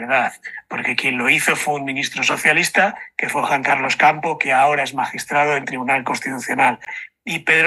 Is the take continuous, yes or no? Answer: yes